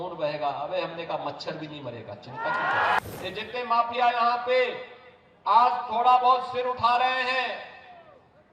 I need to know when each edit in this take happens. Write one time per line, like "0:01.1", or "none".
0:03.0